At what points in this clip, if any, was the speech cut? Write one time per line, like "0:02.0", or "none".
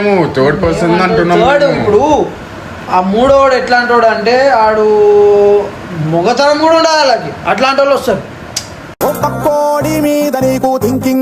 none